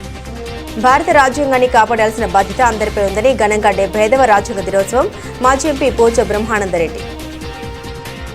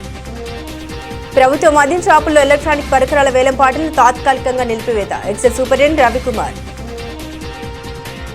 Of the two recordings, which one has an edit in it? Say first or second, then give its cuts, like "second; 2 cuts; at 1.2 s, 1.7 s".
second; 2 cuts; at 0.8 s, 6.6 s